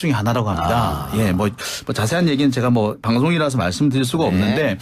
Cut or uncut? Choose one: cut